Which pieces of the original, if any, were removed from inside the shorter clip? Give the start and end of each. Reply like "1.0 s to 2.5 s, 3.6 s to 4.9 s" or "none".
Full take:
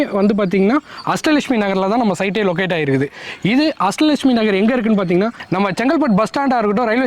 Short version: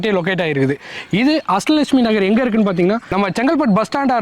5.4 s to 5.5 s